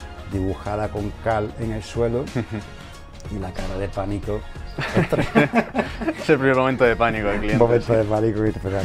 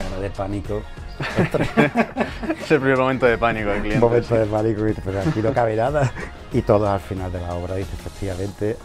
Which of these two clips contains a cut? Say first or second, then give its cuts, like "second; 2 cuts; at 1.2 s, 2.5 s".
second; 1 cut; at 6.3 s